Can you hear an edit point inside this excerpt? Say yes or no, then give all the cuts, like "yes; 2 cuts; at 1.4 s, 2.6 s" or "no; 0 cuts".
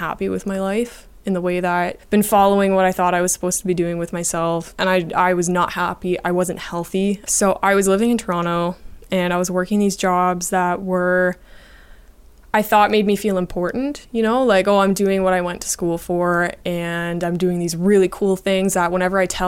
yes; 3 cuts; at 2.0 s, 4.7 s, 7.2 s